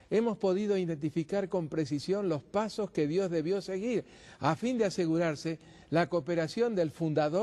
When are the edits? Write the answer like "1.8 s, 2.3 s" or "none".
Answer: 2.2 s